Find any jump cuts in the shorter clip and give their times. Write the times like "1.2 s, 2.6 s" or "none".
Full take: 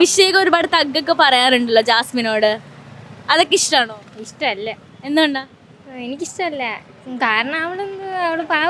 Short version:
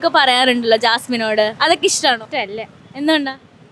1.5 s, 2.2 s